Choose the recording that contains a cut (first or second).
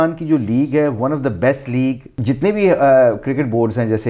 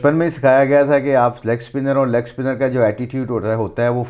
first